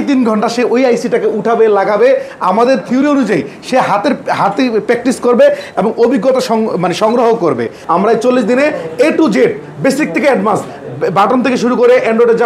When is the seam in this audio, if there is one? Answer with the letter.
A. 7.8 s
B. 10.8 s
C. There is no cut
A